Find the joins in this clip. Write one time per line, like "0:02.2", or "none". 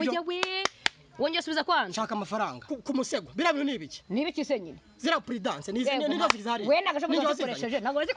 0:02.7